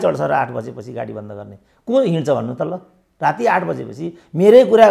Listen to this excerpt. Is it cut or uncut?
uncut